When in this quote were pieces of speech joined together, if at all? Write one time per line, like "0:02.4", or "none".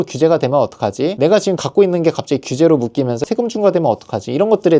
0:03.2